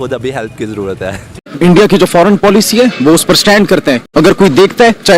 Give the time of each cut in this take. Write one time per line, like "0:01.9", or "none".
0:01.4
0:04.0